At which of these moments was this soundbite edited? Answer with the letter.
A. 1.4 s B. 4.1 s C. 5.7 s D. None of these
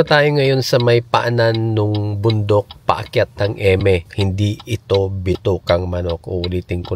B